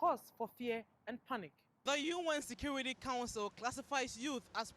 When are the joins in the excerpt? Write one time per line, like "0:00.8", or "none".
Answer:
0:01.6